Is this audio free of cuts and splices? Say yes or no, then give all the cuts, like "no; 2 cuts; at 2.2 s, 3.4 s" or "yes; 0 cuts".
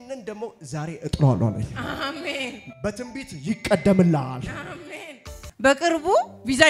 no; 1 cut; at 5.4 s